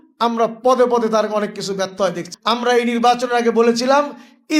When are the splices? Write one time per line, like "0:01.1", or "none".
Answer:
0:02.3